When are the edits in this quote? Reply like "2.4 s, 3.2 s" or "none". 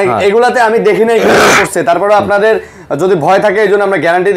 none